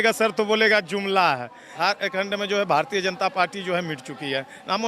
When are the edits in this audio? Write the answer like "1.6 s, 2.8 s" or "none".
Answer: 1.7 s